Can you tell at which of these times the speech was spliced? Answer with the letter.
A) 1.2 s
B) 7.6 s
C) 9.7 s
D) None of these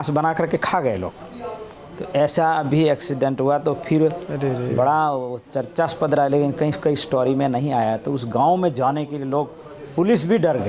D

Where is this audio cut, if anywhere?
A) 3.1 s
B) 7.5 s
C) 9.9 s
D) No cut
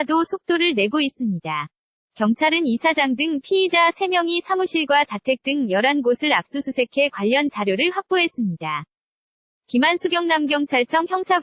D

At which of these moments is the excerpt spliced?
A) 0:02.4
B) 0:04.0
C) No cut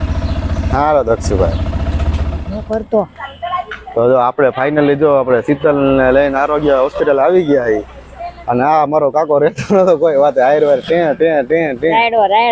A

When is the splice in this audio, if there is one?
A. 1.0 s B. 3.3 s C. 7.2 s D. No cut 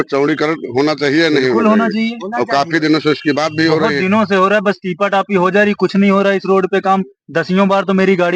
D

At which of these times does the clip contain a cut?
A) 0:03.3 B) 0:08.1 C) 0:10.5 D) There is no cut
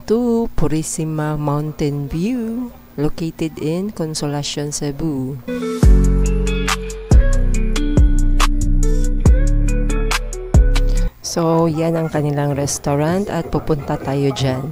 D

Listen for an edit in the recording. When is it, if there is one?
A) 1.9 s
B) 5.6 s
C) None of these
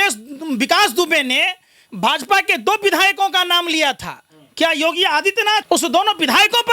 B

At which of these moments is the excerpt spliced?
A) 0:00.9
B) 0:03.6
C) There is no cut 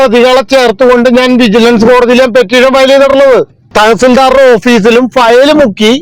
B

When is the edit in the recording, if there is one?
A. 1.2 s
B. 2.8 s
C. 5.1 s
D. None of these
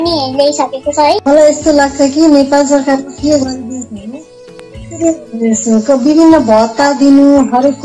A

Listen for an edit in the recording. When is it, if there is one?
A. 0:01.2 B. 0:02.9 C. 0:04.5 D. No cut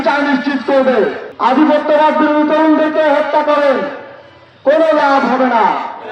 A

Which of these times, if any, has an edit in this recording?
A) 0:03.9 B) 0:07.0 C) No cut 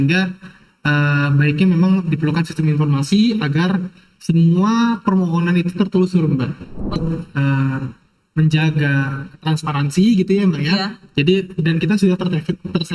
B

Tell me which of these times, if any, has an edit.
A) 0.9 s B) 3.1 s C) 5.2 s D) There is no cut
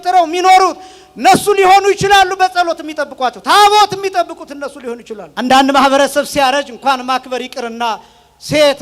C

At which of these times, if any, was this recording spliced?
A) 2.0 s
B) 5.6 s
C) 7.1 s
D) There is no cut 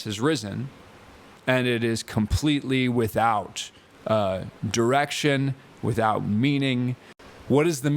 C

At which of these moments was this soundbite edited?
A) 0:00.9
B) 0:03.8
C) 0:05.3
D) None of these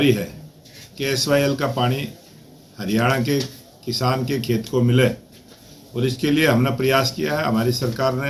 D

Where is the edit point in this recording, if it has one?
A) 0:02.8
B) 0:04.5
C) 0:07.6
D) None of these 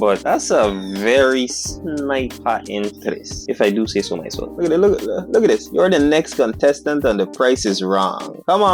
B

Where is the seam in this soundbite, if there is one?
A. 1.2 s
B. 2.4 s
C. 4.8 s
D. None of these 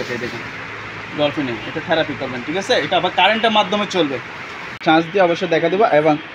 C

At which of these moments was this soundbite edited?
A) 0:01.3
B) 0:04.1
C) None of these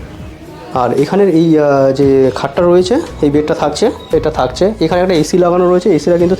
B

